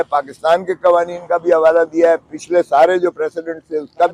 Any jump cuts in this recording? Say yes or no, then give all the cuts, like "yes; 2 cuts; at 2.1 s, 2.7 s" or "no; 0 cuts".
no; 0 cuts